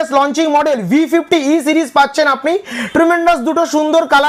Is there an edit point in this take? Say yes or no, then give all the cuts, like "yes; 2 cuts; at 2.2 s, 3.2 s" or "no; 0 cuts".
no; 0 cuts